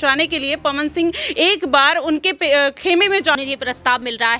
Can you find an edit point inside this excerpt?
yes; 1 cut; at 3.4 s

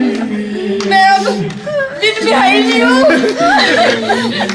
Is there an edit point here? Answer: no; 0 cuts

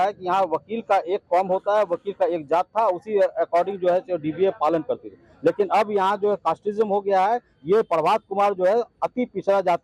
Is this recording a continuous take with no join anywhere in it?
yes; 0 cuts

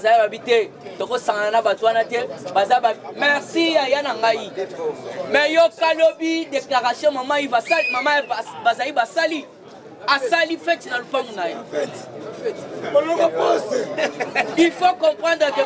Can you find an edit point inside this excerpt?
no; 0 cuts

